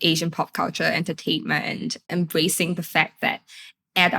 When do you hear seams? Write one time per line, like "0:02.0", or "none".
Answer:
0:02.1